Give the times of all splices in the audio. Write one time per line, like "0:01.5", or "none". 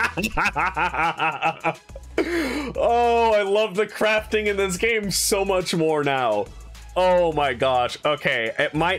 none